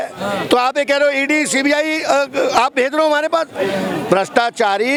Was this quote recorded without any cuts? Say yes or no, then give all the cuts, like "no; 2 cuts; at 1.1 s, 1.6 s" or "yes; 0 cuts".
yes; 0 cuts